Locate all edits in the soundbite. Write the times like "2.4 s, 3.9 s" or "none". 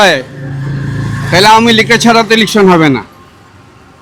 none